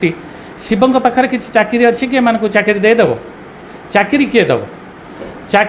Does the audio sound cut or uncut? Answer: uncut